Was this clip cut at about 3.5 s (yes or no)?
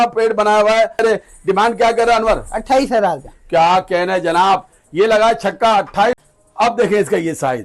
no